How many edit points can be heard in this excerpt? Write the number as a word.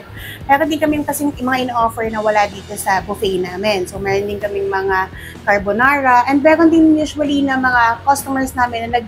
zero